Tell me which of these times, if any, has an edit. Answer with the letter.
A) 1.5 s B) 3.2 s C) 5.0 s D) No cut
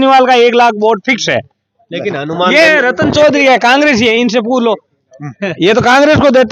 D